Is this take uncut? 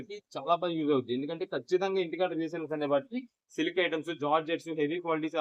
yes; 0 cuts

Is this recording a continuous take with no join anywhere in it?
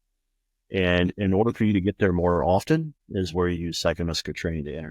no; 1 cut; at 3.0 s

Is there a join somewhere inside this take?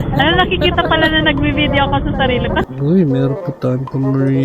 yes; 1 cut; at 2.7 s

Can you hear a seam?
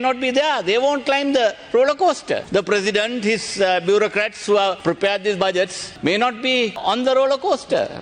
yes; 4 cuts; at 2.4 s, 4.8 s, 5.8 s, 6.8 s

